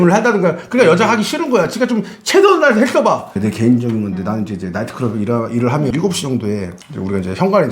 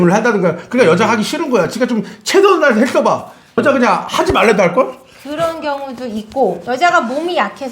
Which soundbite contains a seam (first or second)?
first